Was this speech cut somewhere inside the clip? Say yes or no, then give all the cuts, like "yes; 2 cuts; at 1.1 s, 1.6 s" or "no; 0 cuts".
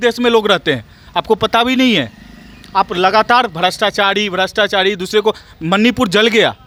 no; 0 cuts